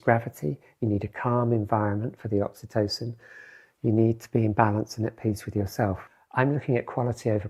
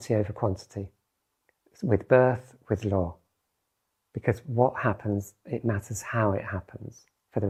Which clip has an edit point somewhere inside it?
first; 1 cut; at 6.1 s

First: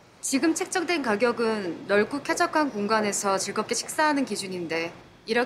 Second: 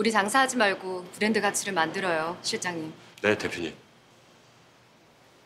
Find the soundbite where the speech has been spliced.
second; 2 cuts; at 3.0 s, 4.1 s

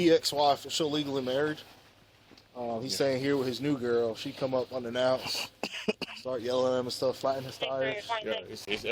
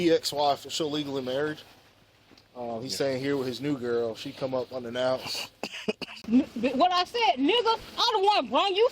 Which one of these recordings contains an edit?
second; 1 cut; at 6.1 s

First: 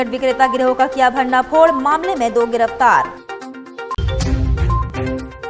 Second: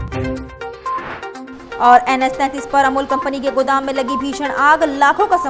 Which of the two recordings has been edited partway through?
second; 1 cut; at 1.4 s

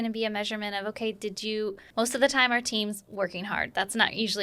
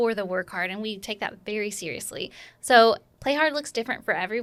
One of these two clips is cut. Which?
first; 1 cut; at 1.8 s

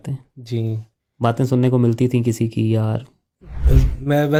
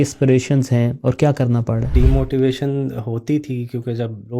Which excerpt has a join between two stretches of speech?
second; 1 cut; at 1.9 s

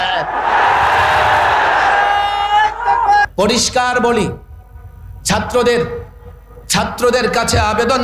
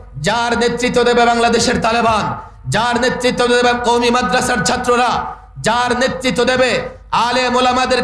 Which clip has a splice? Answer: first; 1 cut; at 3.2 s

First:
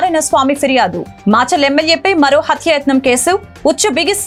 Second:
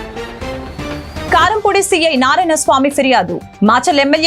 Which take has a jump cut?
second; 1 cut; at 1.3 s

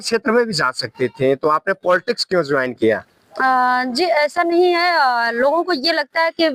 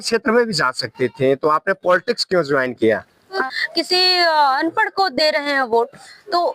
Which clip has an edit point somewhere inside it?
second; 1 cut; at 3.4 s

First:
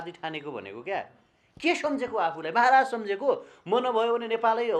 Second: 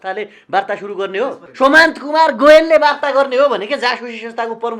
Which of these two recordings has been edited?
second; 1 cut; at 1.4 s

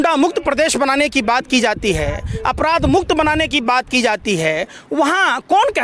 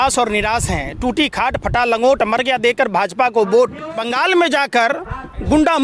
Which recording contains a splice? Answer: second; 1 cut; at 4.0 s

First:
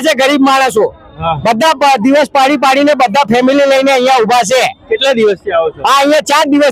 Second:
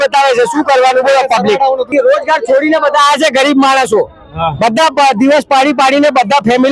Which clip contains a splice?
second; 1 cut; at 1.9 s

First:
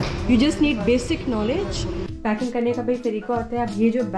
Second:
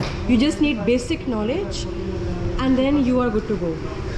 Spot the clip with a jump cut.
first; 1 cut; at 2.0 s

